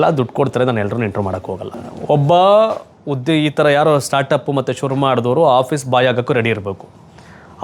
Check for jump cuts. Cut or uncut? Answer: cut